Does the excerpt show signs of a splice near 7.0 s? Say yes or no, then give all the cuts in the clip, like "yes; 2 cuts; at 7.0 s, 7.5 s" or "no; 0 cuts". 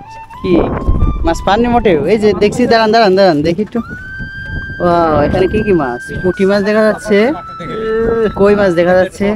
no; 0 cuts